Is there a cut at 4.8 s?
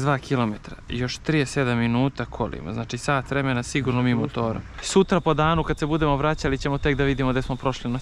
yes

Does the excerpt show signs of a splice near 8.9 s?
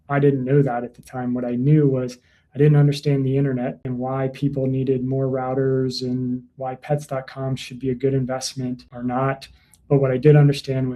yes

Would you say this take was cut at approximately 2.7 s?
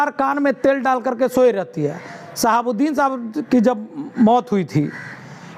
no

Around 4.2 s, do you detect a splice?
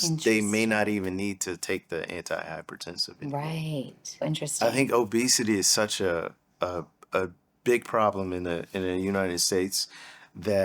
yes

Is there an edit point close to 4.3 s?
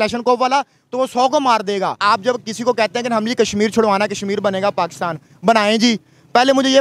no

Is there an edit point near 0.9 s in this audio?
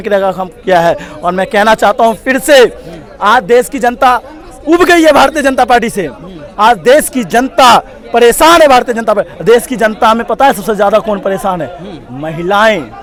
no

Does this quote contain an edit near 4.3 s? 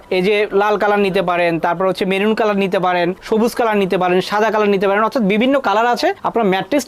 no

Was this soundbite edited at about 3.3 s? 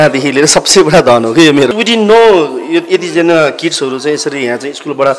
no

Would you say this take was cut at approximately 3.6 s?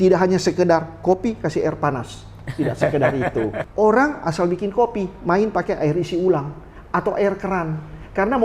yes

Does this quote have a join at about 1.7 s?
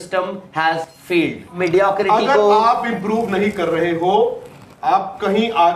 yes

